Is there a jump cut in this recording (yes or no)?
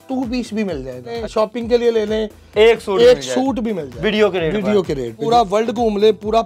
yes